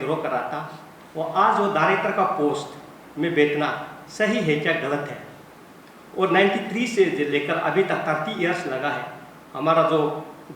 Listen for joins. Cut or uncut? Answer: uncut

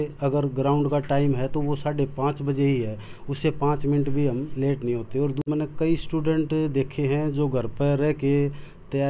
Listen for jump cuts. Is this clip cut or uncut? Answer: cut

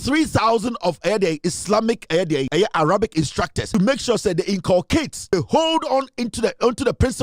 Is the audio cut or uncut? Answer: cut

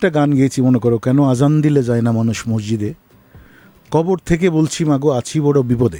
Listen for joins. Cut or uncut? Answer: uncut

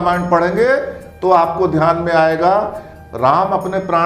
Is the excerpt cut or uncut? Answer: uncut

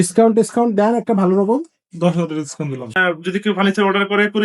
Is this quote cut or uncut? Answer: cut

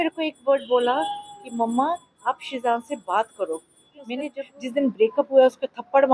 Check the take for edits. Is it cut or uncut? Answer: cut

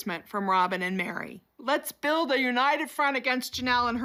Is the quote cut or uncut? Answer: uncut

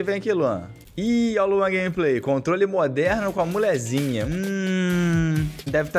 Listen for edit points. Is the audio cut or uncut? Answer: cut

